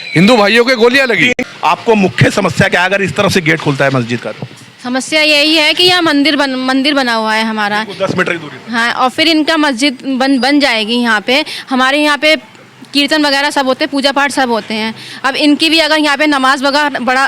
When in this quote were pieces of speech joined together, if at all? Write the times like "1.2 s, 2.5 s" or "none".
1.3 s